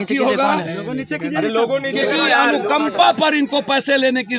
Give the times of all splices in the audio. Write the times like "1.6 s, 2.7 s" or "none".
none